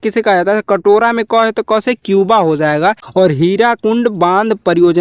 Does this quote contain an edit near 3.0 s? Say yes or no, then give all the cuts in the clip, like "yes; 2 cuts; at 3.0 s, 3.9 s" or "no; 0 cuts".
yes; 1 cut; at 3.0 s